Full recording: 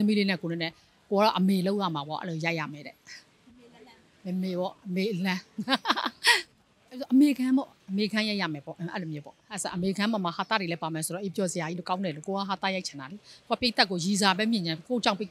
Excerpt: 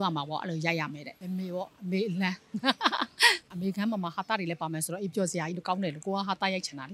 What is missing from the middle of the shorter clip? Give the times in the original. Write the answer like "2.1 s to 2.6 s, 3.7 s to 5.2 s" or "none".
2.9 s to 4.1 s, 6.5 s to 9.7 s